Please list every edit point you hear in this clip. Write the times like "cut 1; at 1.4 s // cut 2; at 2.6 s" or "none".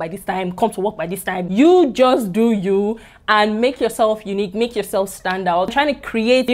cut 1; at 1.4 s // cut 2; at 5.7 s